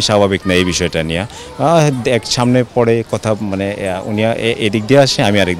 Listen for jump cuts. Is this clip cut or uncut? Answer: uncut